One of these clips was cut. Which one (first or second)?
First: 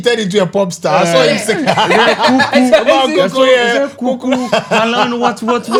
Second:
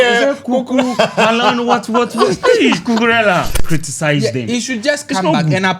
second